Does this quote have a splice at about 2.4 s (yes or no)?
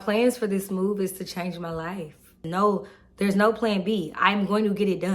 yes